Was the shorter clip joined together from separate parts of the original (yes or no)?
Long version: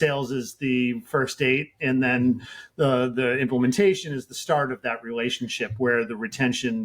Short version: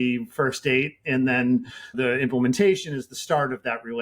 yes